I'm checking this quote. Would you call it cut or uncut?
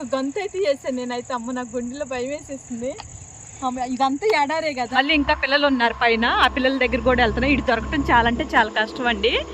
cut